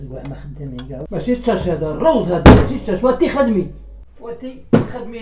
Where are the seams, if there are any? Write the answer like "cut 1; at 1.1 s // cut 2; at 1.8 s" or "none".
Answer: cut 1; at 1.1 s